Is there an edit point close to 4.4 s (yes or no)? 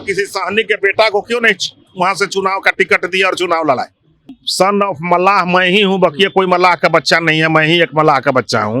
yes